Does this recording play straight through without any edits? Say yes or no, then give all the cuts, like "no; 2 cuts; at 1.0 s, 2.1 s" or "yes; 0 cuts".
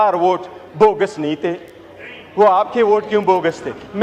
yes; 0 cuts